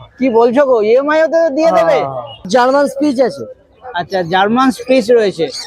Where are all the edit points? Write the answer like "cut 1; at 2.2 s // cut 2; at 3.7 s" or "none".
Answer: cut 1; at 2.5 s